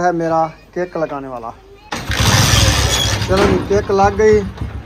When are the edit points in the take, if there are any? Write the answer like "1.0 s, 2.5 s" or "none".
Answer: 1.7 s